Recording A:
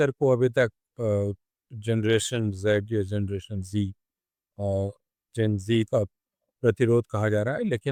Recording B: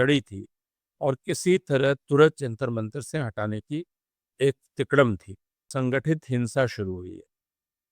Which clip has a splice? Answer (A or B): B